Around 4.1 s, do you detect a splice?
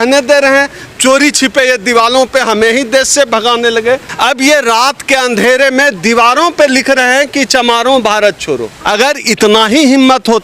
yes; 2 cuts; at 4.1 s, 8.7 s

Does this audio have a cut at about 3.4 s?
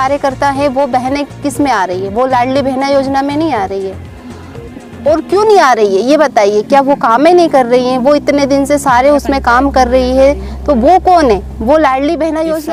no; 0 cuts

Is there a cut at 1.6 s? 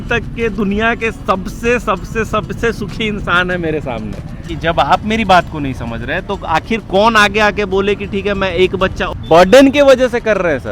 no; 2 cuts; at 4.4 s, 9.1 s

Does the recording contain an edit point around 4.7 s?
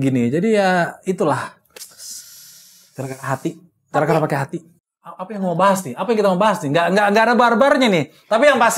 yes; 1 cut; at 4.7 s

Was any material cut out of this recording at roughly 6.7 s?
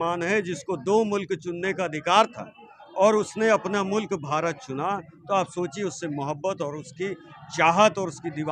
no; 0 cuts

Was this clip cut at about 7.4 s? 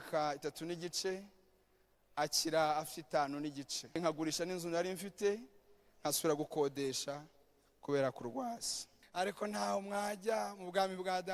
no; 2 cuts; at 4.0 s, 8.9 s

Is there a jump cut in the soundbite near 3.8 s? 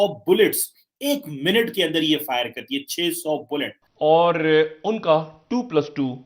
yes; 1 cut; at 3.8 s

